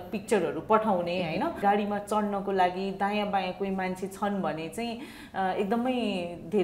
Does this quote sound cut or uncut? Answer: cut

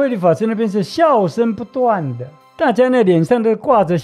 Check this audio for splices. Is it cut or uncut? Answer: cut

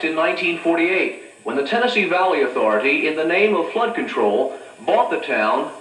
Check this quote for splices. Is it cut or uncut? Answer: uncut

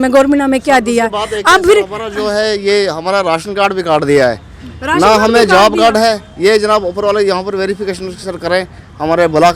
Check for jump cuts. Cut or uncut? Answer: uncut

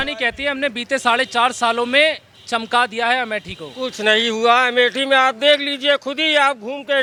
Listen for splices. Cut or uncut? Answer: uncut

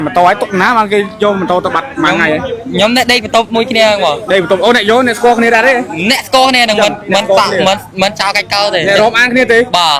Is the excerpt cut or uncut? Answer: uncut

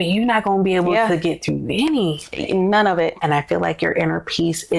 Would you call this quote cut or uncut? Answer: uncut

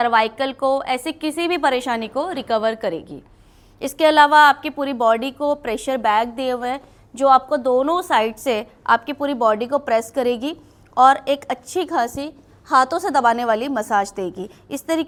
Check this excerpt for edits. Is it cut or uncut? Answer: uncut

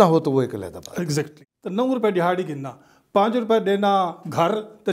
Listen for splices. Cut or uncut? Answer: cut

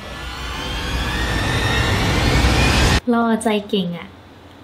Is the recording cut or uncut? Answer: cut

